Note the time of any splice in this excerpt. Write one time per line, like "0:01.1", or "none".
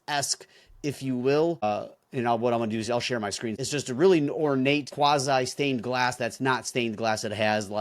0:01.6
0:03.6
0:04.9

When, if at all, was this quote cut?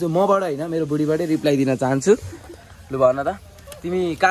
none

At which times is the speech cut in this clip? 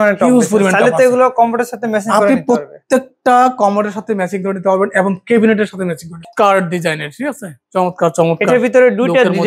0:06.2

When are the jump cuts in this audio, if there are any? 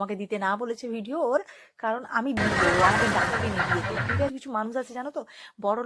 0:04.3

